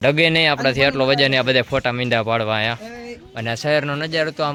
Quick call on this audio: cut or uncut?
uncut